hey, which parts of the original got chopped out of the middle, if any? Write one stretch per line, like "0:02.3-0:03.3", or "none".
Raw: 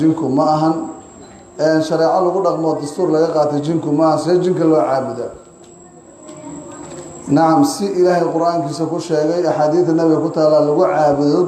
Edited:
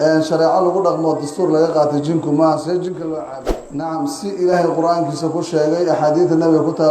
0:04.7-0:06.7